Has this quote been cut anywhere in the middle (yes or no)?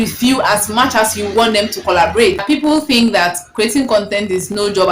yes